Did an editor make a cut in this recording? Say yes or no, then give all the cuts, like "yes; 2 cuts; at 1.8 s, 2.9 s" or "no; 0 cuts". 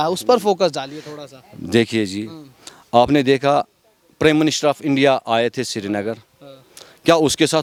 no; 0 cuts